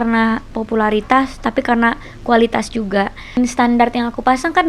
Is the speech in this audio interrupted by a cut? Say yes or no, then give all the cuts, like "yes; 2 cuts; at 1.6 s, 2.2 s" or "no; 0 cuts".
yes; 1 cut; at 3.4 s